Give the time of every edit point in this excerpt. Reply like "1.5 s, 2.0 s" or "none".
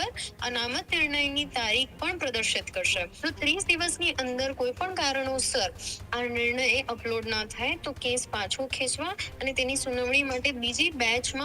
3.1 s